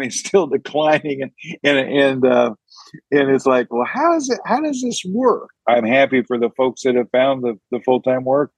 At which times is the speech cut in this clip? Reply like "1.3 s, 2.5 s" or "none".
5.5 s